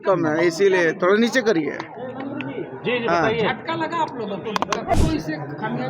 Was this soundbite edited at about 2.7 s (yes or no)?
no